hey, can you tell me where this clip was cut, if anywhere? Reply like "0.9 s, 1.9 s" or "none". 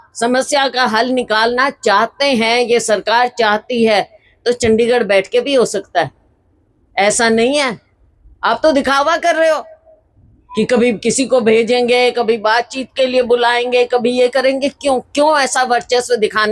none